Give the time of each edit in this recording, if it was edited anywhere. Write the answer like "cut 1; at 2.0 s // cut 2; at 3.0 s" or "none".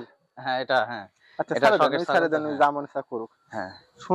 none